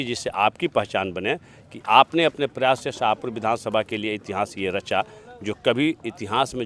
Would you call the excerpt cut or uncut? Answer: uncut